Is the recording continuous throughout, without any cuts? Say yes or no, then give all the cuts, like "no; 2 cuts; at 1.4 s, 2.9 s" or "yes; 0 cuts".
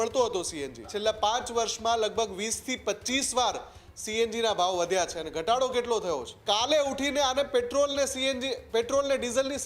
no; 2 cuts; at 0.9 s, 6.3 s